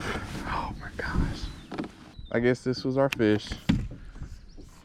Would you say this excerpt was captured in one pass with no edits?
yes; 0 cuts

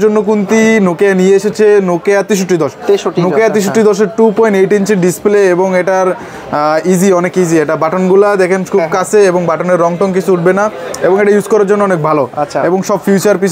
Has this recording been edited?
no; 0 cuts

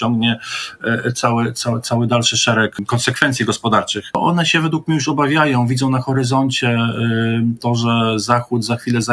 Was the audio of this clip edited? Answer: yes; 2 cuts; at 2.8 s, 4.1 s

